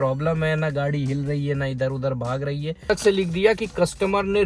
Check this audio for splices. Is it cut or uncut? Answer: cut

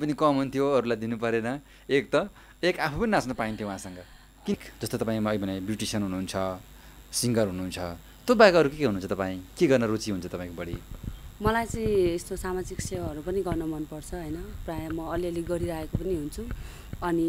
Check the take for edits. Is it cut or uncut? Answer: cut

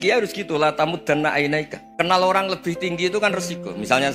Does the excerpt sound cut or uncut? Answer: cut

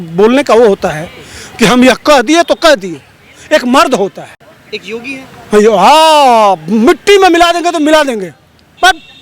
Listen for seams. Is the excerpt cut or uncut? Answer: cut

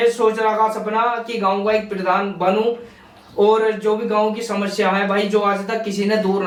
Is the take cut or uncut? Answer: uncut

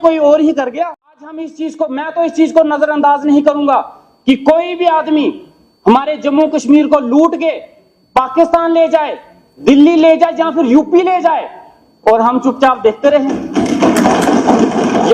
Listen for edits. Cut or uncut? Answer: cut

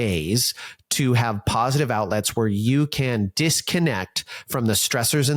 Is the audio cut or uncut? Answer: uncut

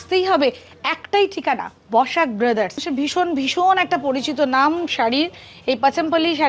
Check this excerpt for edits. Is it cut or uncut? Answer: cut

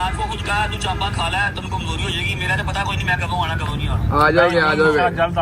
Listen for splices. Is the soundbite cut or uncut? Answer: uncut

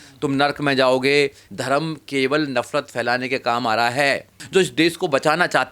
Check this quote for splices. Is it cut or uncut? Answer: cut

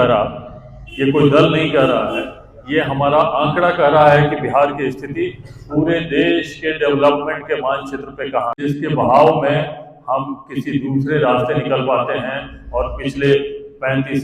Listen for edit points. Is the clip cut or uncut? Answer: cut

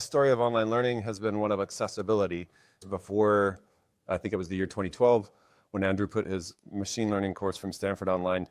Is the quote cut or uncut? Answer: cut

